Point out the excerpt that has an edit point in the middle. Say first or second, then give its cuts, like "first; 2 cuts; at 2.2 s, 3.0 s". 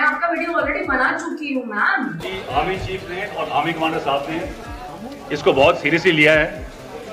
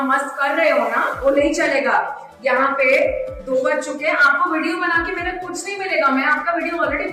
first; 1 cut; at 2.2 s